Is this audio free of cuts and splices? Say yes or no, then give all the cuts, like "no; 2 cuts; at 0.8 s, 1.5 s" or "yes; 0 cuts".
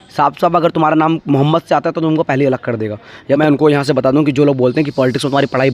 no; 1 cut; at 3.4 s